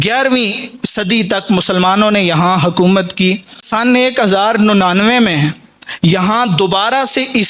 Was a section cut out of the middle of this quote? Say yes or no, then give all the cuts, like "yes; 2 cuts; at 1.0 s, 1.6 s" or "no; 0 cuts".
yes; 1 cut; at 3.7 s